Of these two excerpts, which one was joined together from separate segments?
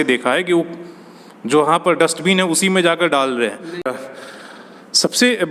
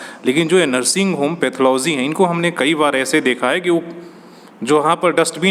first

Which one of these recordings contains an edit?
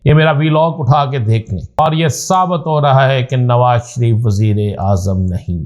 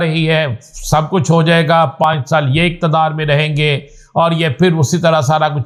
first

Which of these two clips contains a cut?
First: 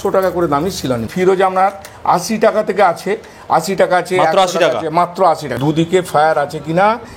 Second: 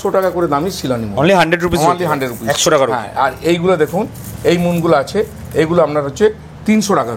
first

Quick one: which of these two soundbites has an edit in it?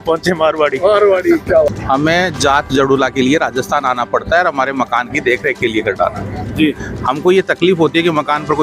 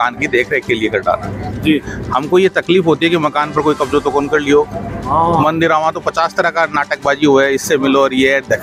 first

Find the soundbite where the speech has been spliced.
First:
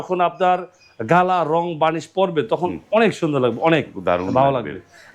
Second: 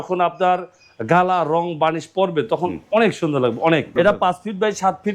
second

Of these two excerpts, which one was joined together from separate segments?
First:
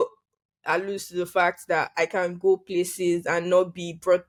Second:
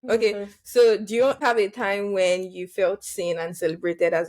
second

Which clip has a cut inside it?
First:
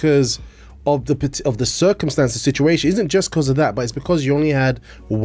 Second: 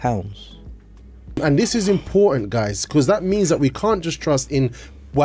second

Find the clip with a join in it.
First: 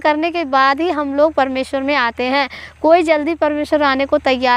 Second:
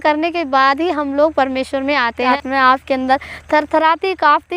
second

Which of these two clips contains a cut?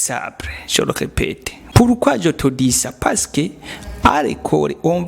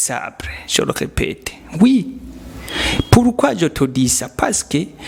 first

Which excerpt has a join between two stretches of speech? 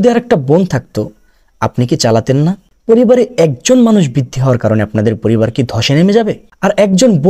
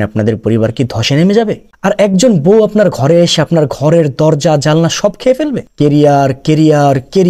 second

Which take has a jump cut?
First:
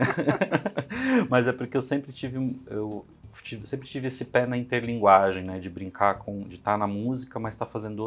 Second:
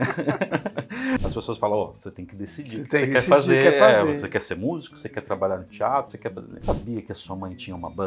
second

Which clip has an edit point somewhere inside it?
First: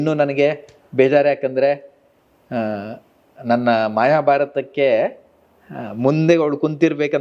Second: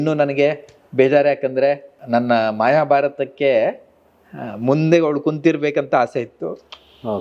second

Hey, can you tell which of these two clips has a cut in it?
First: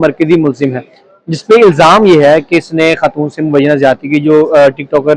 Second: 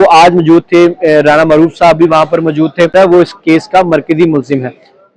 second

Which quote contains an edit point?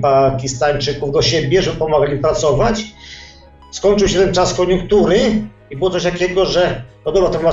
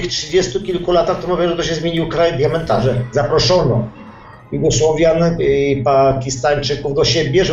second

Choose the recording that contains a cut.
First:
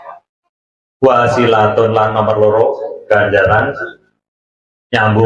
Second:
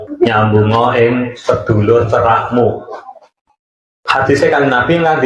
second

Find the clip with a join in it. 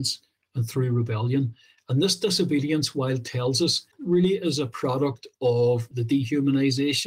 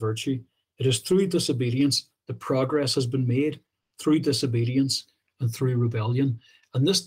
first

